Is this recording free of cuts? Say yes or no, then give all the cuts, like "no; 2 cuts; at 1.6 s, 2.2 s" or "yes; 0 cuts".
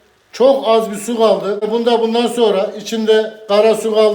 no; 1 cut; at 1.7 s